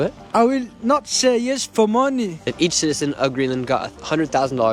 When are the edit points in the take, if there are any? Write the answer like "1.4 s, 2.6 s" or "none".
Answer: 2.4 s